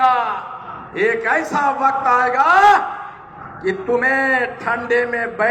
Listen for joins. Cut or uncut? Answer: uncut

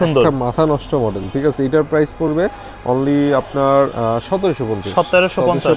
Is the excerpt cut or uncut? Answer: uncut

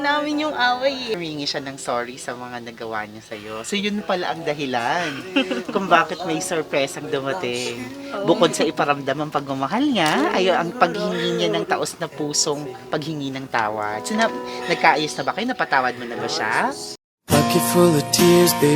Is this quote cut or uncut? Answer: cut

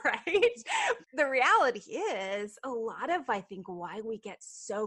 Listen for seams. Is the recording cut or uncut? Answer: cut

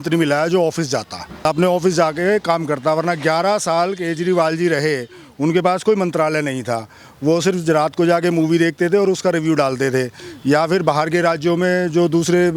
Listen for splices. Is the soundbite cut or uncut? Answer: cut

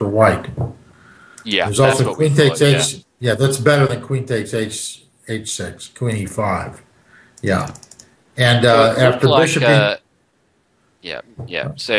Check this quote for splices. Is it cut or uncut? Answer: uncut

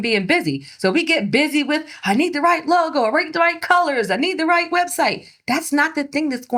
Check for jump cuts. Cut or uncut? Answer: uncut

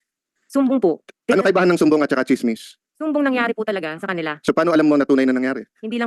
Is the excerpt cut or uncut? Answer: uncut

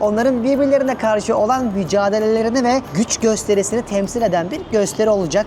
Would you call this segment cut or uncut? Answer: uncut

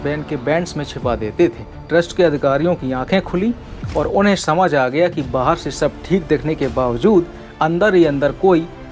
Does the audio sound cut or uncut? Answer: cut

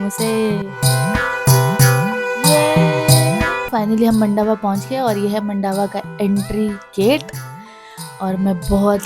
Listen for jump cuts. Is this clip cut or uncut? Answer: cut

